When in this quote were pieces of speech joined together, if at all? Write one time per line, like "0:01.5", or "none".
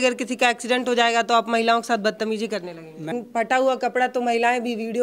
0:03.1

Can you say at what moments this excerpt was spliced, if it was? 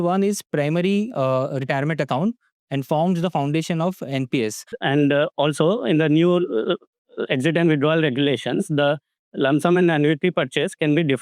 0:04.7

